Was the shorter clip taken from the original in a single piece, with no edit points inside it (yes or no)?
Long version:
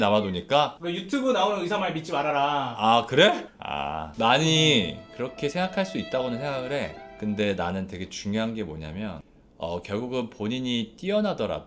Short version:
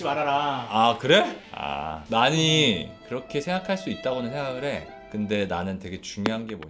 yes